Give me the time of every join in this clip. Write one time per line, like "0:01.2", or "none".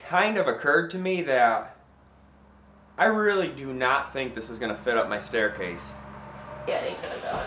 0:06.1